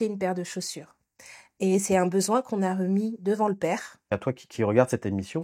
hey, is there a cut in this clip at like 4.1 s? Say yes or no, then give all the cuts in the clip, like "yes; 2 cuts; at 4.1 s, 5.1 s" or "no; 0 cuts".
yes; 1 cut; at 4.1 s